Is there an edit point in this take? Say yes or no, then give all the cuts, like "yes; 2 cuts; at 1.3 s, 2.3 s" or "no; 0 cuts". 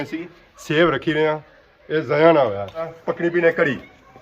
yes; 1 cut; at 2.9 s